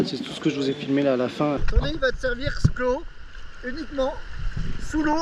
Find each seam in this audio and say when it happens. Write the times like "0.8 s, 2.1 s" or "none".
1.6 s